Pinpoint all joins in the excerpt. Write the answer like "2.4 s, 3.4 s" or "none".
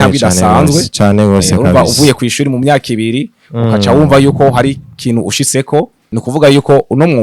6.0 s